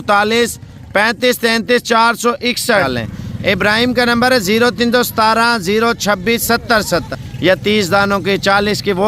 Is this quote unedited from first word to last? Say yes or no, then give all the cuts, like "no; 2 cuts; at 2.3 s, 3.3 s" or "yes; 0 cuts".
no; 2 cuts; at 2.8 s, 7.2 s